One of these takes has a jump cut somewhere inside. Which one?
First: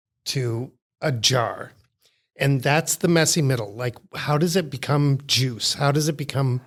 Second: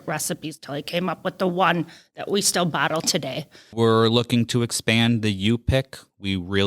second; 1 cut; at 3.6 s

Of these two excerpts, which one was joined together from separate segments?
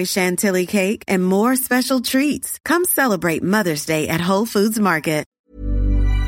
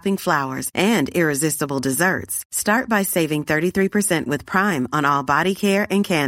first; 1 cut; at 5.3 s

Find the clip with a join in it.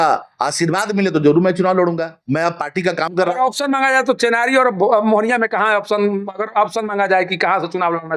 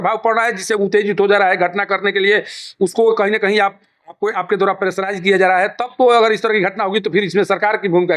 first; 1 cut; at 2.1 s

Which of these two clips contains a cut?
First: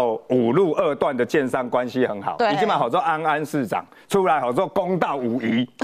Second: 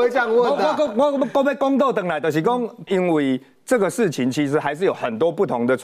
second; 1 cut; at 2.8 s

